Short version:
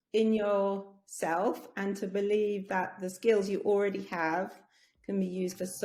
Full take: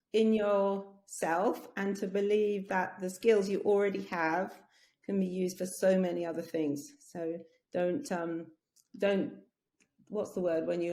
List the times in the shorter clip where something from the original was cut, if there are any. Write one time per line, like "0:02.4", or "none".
none